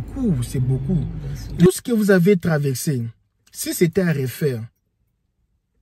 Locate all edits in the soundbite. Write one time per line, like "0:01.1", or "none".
0:01.7